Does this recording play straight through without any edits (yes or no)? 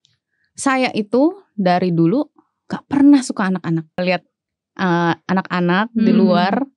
no